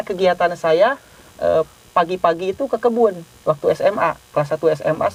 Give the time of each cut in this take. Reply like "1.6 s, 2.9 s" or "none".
none